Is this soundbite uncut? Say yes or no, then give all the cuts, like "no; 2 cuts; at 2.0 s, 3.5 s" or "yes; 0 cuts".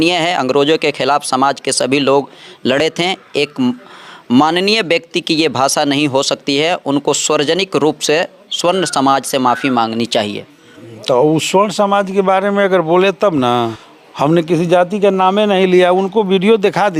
yes; 0 cuts